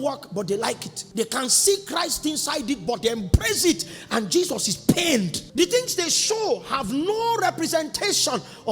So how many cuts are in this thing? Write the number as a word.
two